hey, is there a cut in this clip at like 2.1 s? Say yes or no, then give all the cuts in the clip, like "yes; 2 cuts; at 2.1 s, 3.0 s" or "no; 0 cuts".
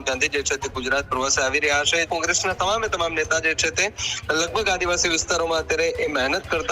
yes; 1 cut; at 2.1 s